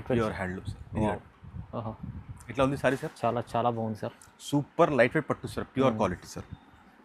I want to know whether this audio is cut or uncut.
uncut